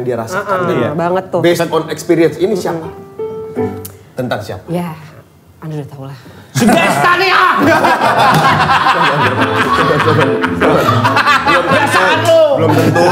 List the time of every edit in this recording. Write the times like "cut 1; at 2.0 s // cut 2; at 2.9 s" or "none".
none